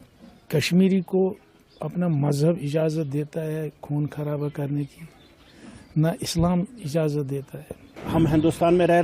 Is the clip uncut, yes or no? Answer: no